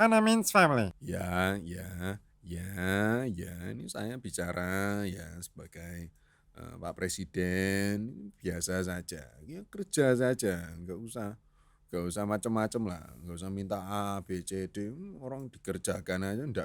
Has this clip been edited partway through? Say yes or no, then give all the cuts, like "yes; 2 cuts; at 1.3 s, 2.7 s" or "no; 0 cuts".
yes; 1 cut; at 1.0 s